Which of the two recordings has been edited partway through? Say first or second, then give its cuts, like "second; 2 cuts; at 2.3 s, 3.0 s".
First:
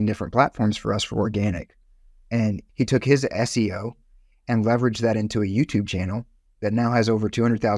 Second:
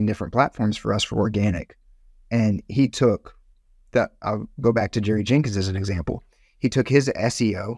first; 1 cut; at 2.6 s